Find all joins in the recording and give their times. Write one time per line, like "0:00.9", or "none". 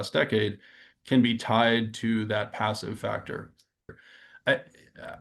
0:04.0

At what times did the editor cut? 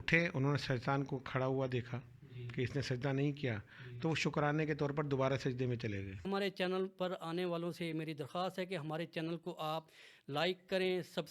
0:06.3

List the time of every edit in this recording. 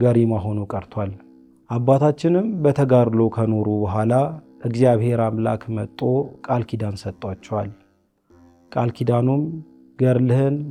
none

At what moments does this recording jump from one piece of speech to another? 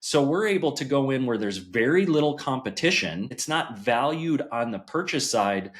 0:03.4

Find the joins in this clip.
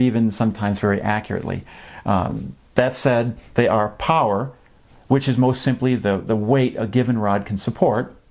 none

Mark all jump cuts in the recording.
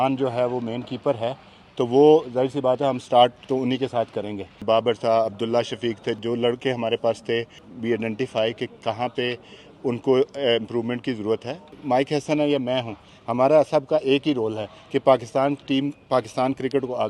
0:04.6
0:06.2
0:07.6
0:11.8

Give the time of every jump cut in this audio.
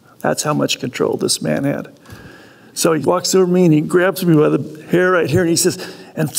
0:03.0

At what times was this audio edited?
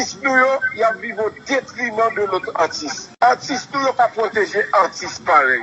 0:04.2

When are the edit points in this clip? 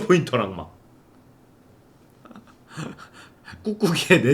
none

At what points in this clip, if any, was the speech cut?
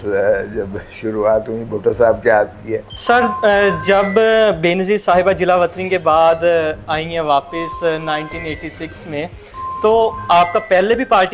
none

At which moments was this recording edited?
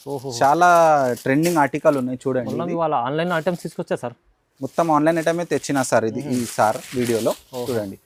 none

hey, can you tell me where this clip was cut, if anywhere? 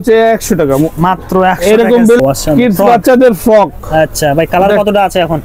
0:02.2

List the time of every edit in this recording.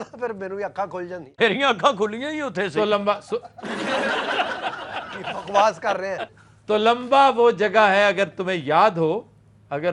none

